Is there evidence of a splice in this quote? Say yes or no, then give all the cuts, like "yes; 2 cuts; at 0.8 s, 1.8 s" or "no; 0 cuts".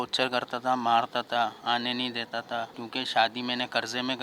yes; 1 cut; at 2.8 s